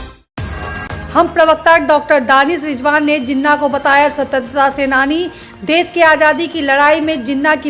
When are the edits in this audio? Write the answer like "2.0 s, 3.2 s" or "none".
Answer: 0.9 s